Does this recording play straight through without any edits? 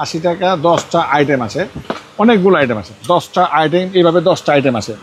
yes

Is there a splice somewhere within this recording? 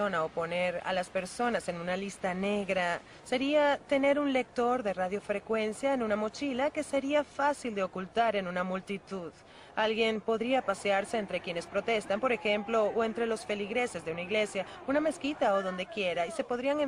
yes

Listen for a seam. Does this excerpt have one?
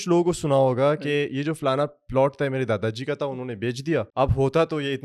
yes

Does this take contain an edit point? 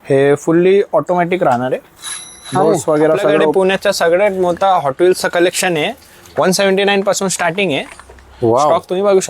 yes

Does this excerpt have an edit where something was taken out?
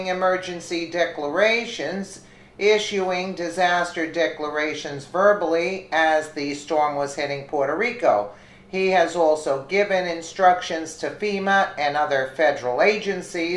no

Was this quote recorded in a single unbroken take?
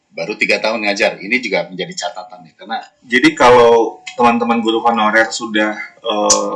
no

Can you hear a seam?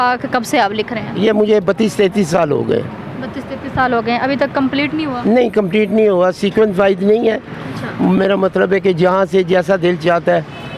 no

